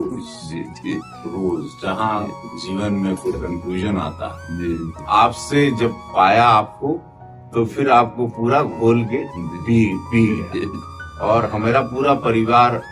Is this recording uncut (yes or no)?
no